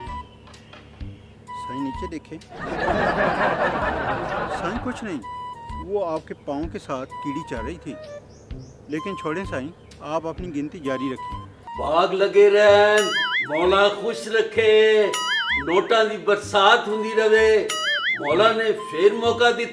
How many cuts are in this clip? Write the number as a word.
one